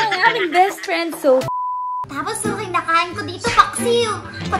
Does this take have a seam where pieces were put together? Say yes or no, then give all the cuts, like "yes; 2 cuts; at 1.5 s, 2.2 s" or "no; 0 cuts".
yes; 1 cut; at 1.6 s